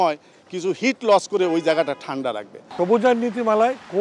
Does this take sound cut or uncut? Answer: cut